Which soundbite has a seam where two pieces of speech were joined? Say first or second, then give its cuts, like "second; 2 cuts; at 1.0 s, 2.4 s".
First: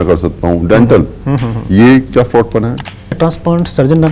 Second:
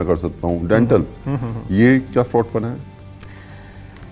first; 1 cut; at 3.2 s